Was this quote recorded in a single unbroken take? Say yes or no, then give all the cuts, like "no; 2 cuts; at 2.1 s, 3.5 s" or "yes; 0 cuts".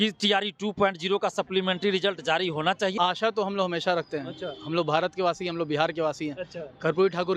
no; 1 cut; at 2.9 s